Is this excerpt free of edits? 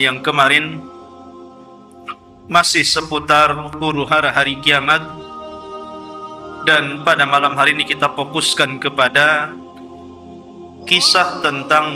no; 4 cuts; at 5.0 s, 6.6 s, 9.5 s, 10.9 s

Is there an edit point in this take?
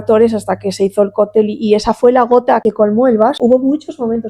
yes; 2 cuts; at 2.6 s, 3.4 s

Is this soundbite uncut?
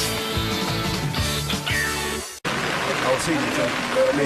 yes; 0 cuts

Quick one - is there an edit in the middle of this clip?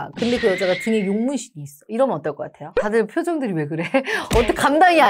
yes; 1 cut; at 1.7 s

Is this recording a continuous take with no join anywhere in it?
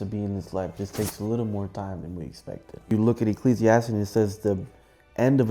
no; 1 cut; at 2.9 s

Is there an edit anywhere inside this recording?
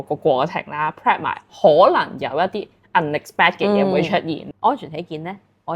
yes; 1 cut; at 4.4 s

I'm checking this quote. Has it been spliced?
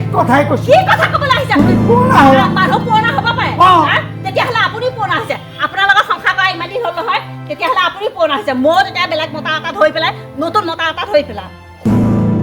yes; 1 cut; at 11.5 s

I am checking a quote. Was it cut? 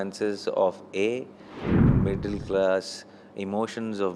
yes; 1 cut; at 1.8 s

